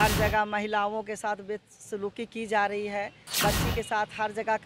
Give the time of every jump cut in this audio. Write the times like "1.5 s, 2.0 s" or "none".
3.3 s